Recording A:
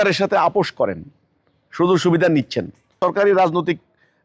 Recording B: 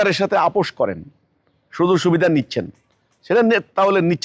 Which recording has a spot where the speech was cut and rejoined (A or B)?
A